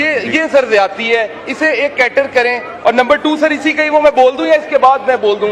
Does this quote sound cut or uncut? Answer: uncut